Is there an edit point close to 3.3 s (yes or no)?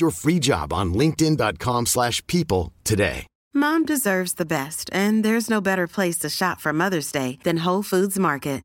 yes